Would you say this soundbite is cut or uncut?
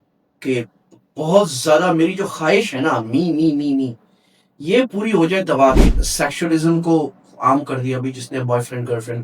cut